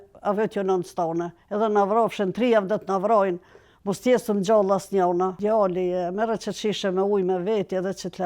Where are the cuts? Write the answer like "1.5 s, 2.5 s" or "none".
5.4 s